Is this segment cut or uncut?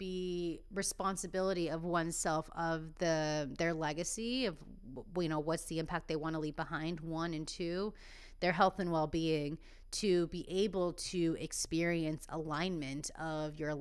uncut